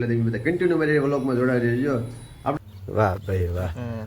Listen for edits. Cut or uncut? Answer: cut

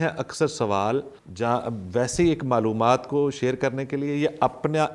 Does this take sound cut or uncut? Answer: cut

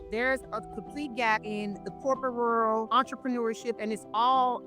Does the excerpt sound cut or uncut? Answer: cut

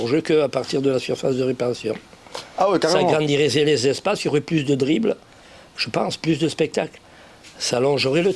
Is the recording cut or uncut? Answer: uncut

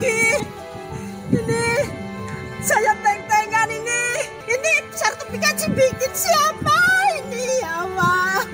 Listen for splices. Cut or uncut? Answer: cut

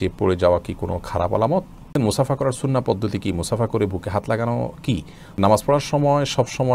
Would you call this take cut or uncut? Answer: cut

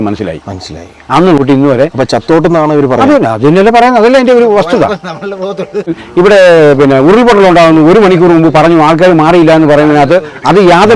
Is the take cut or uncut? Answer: cut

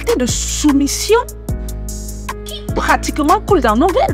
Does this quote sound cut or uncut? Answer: uncut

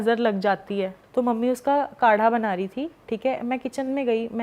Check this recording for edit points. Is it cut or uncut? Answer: cut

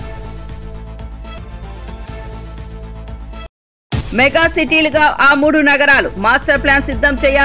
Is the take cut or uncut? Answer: cut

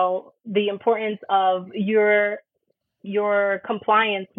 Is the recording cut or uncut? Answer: uncut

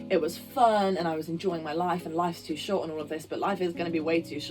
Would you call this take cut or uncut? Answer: uncut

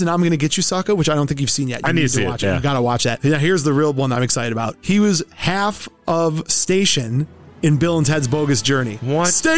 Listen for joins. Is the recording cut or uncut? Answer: uncut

